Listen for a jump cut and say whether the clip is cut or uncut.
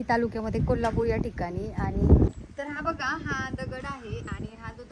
cut